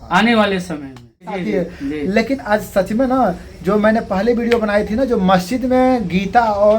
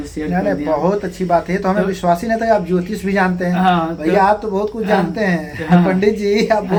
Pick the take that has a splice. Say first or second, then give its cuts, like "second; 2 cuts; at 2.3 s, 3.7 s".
first; 1 cut; at 1.4 s